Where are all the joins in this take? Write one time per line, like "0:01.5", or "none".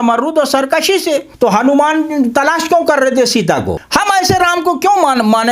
0:01.3
0:03.8